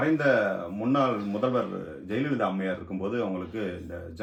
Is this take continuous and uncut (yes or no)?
yes